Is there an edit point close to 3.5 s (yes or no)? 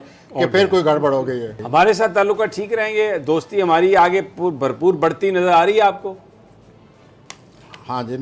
no